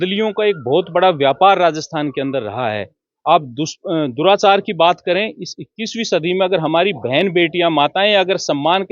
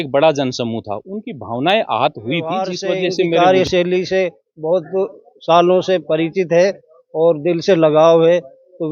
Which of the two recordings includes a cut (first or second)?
second